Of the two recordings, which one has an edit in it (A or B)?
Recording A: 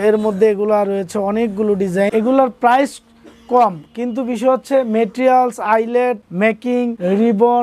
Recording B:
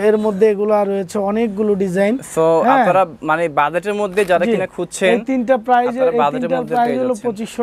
A